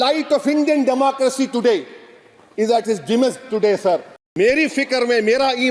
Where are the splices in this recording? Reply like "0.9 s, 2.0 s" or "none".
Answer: 4.2 s

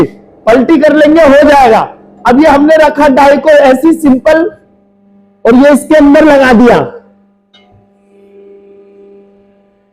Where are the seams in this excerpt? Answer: none

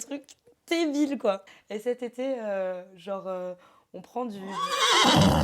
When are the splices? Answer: 1.4 s, 4.5 s

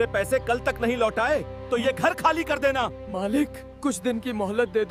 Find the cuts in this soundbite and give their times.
none

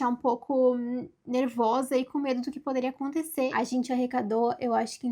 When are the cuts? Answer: 3.5 s

